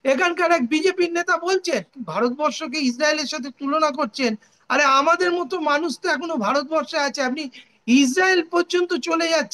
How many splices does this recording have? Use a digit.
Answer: 1